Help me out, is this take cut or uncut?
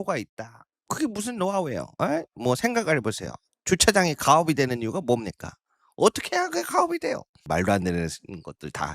cut